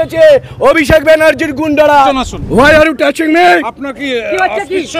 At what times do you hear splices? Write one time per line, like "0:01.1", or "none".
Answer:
0:02.1